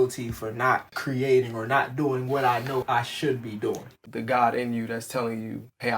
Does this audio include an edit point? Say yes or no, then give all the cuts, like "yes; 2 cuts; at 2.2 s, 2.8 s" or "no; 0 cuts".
yes; 3 cuts; at 0.9 s, 2.8 s, 3.9 s